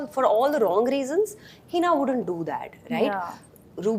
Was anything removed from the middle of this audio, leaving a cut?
no; 0 cuts

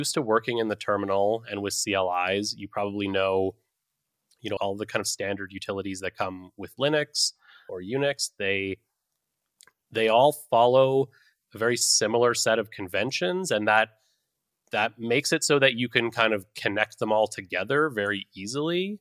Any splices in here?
yes; 2 cuts; at 4.6 s, 7.7 s

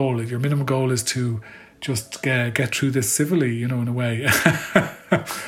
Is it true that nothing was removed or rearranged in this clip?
yes; 0 cuts

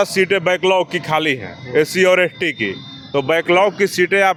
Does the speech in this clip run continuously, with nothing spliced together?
yes; 0 cuts

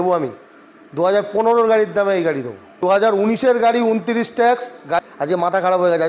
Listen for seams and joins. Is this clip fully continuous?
no; 2 cuts; at 2.8 s, 5.0 s

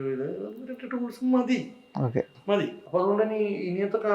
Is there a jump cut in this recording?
yes; 1 cut; at 2.8 s

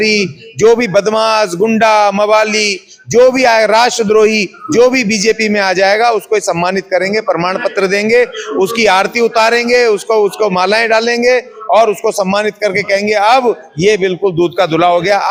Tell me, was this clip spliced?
no; 0 cuts

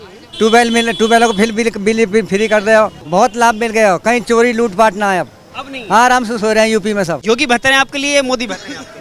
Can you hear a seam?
yes; 2 cuts; at 3.0 s, 7.2 s

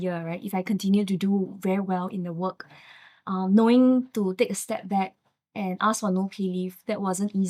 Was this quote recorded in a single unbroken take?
yes; 0 cuts

